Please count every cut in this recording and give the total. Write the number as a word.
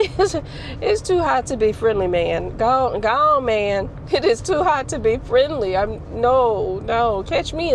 zero